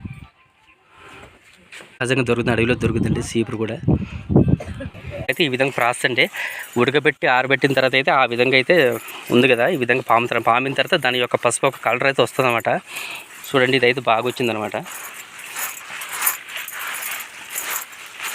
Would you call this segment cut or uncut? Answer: cut